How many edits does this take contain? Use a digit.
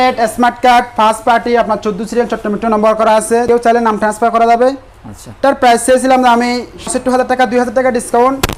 2